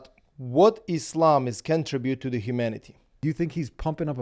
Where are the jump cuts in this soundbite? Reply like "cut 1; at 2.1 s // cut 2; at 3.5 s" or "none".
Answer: cut 1; at 3.2 s